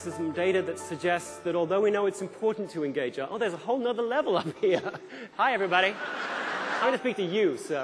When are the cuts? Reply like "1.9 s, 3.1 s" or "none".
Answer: 5.2 s, 6.7 s